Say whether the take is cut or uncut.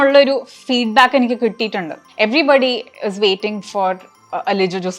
cut